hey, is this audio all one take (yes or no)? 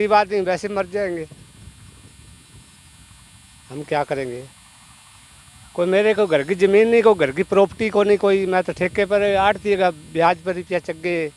yes